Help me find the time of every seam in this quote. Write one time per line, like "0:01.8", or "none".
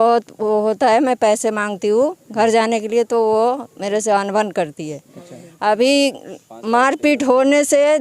none